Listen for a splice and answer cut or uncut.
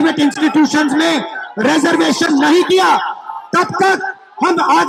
uncut